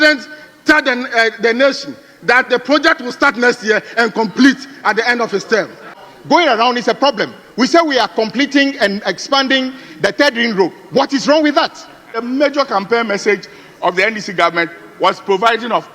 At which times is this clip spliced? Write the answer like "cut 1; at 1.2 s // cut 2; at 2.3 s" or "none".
cut 1; at 6.1 s // cut 2; at 12.2 s